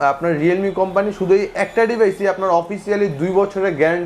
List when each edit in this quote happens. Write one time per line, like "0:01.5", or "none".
none